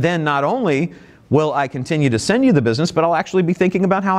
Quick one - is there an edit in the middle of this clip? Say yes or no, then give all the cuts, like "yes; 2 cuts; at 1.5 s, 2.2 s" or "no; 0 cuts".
no; 0 cuts